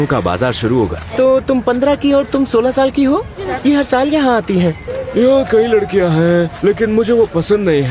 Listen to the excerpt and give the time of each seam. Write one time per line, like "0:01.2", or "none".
0:01.0
0:03.4
0:04.9